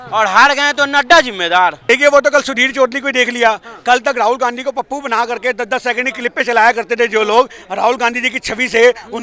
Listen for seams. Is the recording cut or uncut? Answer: cut